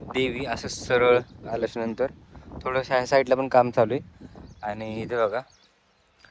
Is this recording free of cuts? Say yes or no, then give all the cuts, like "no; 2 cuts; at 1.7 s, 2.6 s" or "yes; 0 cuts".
yes; 0 cuts